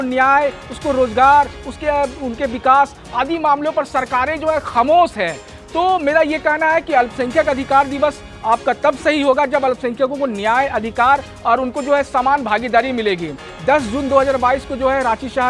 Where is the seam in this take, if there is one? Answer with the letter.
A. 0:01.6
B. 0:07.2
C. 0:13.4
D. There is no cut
C